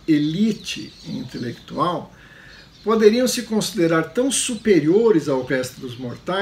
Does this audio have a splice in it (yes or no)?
no